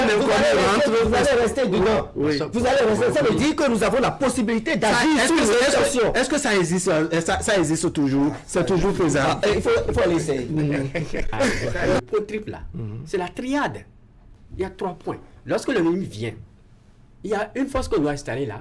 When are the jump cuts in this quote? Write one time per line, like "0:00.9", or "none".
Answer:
0:12.0

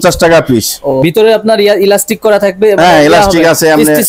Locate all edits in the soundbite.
0:01.0

